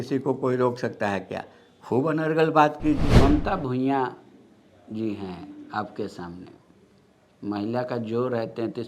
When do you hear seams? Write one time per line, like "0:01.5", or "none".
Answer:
0:03.0

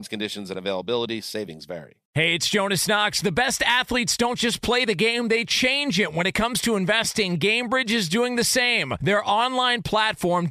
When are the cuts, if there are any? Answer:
0:01.9

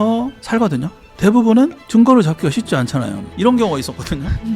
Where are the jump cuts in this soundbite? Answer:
0:01.1
0:03.3

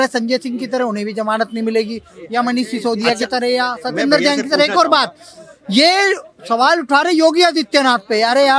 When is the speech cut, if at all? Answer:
none

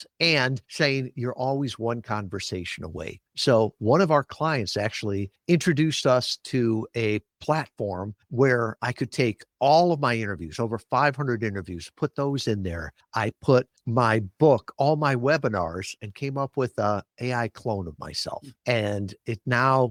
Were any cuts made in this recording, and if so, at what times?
none

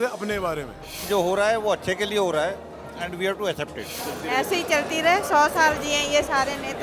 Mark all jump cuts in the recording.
0:01.0
0:04.0

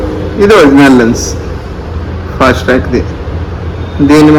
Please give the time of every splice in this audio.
none

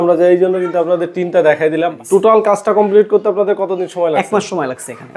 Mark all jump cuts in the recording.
0:01.9

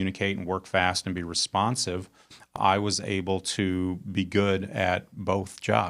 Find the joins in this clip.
0:02.5

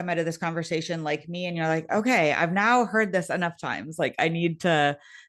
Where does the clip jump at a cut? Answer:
none

